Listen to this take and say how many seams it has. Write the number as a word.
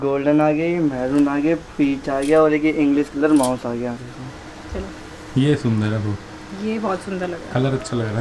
one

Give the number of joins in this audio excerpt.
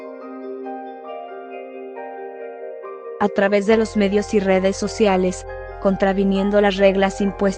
one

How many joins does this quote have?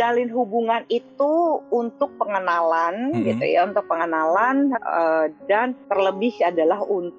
zero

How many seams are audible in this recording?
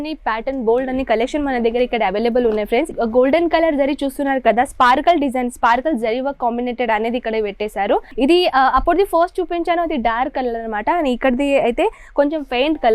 two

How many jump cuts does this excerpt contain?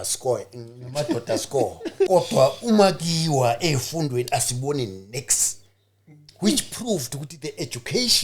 one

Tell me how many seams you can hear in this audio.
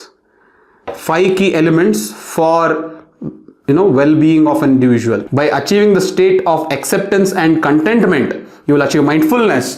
one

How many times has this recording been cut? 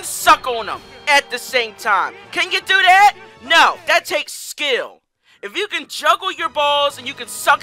zero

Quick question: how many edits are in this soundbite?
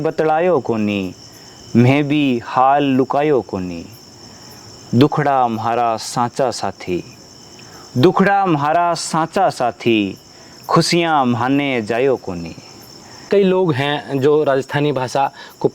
one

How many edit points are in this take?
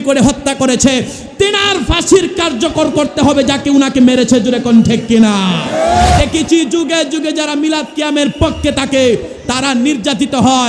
one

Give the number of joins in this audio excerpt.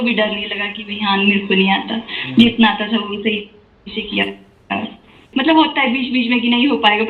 one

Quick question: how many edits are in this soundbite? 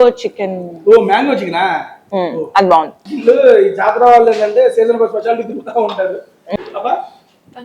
two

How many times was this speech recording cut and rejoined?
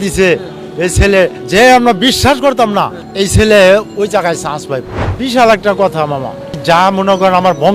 four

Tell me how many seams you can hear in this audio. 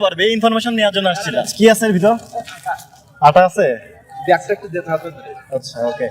one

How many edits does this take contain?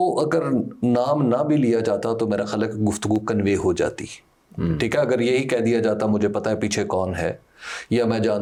zero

